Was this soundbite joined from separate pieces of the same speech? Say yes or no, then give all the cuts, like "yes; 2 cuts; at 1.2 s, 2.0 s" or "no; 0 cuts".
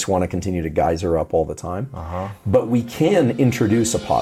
no; 0 cuts